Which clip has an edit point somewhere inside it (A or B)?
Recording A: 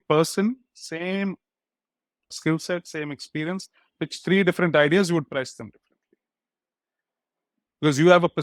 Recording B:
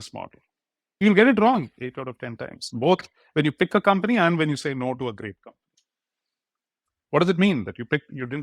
B